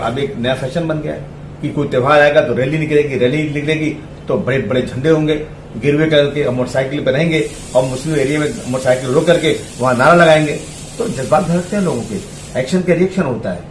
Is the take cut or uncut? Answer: uncut